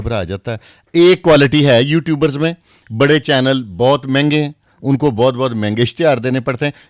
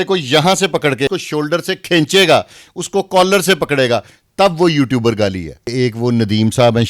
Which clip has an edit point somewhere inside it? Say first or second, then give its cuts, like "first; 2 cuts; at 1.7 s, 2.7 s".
second; 2 cuts; at 1.1 s, 5.7 s